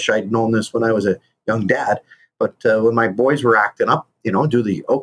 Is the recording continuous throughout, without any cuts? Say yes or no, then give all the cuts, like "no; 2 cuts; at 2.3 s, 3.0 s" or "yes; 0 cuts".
yes; 0 cuts